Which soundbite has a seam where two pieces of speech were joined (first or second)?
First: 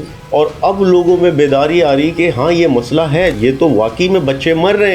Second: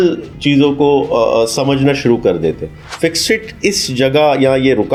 first